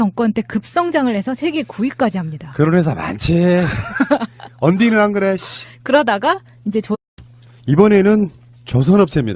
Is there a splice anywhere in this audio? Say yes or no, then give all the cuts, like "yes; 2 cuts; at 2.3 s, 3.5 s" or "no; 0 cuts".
no; 0 cuts